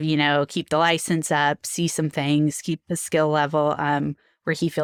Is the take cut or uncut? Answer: uncut